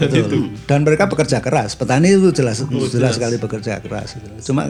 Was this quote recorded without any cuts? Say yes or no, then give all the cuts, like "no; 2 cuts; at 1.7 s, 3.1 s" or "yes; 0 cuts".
yes; 0 cuts